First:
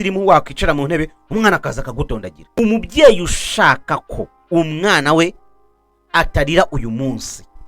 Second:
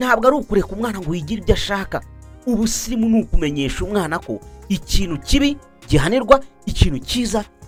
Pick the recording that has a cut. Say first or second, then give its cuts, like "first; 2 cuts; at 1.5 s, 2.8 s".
first; 1 cut; at 2.4 s